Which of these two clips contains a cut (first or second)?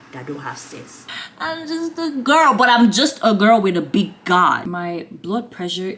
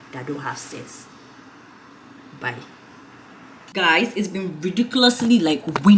first